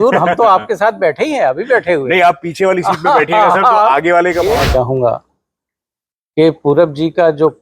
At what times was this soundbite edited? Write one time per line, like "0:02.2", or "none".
0:04.6

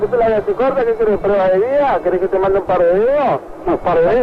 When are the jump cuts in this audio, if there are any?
none

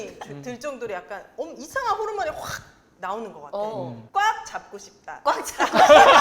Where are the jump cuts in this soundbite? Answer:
0:04.0

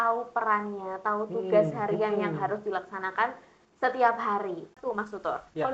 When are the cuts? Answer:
0:04.7

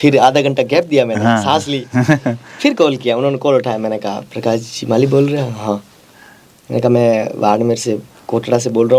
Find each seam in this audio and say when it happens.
none

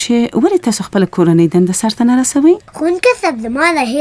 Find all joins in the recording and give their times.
0:02.7

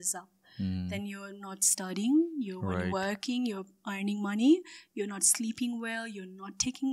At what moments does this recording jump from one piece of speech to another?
none

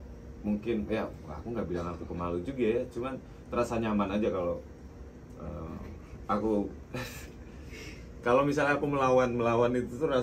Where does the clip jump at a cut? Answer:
none

